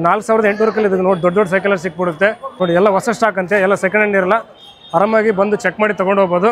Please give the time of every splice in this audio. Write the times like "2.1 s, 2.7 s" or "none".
2.5 s